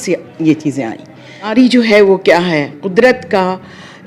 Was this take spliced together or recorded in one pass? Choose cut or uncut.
cut